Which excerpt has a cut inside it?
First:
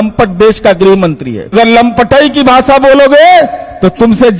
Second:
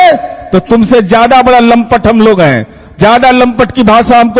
first; 1 cut; at 1.5 s

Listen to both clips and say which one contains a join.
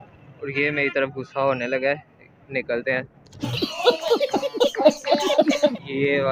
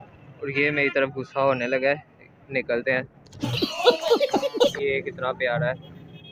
second; 1 cut; at 4.7 s

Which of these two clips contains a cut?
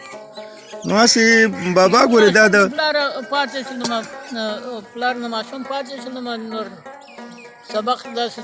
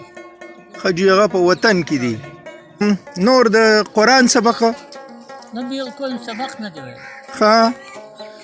second; 1 cut; at 2.8 s

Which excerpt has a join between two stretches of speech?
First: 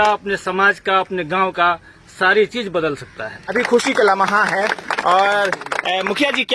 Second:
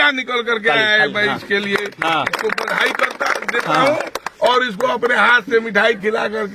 first; 1 cut; at 3.5 s

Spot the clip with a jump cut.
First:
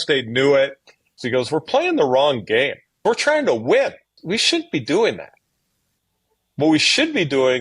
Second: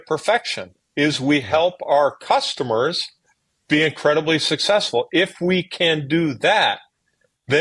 first; 3 cuts; at 1.2 s, 3.0 s, 4.2 s

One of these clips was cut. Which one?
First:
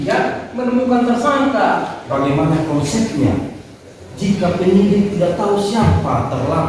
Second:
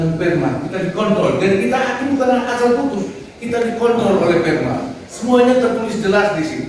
first; 1 cut; at 2.0 s

